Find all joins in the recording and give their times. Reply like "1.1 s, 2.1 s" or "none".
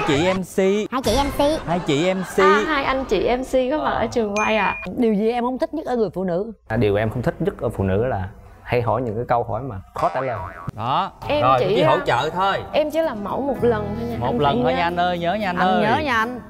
4.8 s, 10.5 s